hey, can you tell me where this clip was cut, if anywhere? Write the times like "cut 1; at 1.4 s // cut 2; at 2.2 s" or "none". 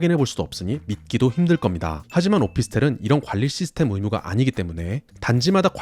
cut 1; at 2.0 s